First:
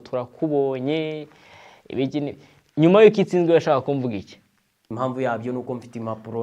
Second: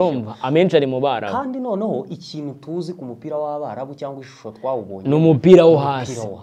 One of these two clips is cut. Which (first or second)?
first